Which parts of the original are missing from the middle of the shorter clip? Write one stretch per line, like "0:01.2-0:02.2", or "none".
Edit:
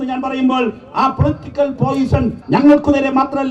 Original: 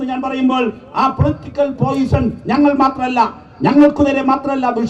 0:02.4-0:03.5